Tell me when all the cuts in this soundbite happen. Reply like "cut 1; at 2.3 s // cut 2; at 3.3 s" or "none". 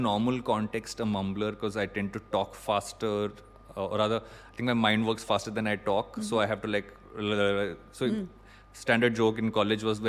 none